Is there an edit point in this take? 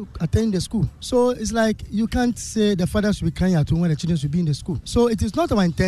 yes; 1 cut; at 4.8 s

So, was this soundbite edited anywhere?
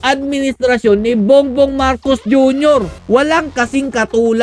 yes; 1 cut; at 3.0 s

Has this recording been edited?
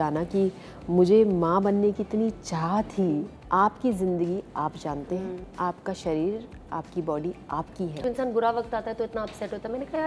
yes; 3 cuts; at 3.4 s, 5.4 s, 8.0 s

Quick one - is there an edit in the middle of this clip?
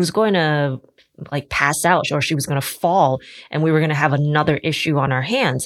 no; 0 cuts

